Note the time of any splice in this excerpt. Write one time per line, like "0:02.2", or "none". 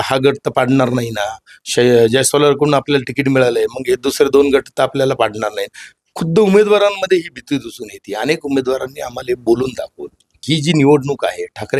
0:10.4

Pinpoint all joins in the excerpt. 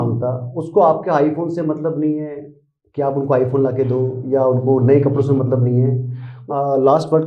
0:06.3

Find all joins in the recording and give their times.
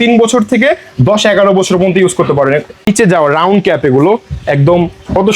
0:02.7

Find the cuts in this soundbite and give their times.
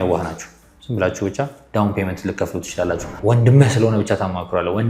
0:03.1

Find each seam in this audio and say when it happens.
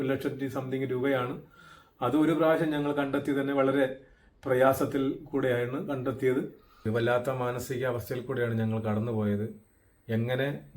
0:06.7

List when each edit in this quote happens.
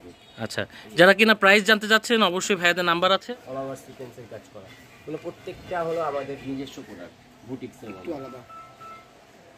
0:03.3

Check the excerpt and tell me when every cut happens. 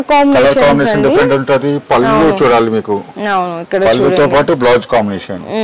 none

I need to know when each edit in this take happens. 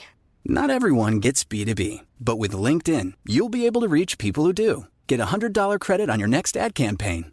none

